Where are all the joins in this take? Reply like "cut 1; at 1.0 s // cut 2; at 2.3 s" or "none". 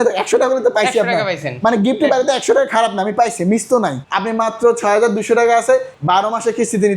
cut 1; at 4.0 s // cut 2; at 5.9 s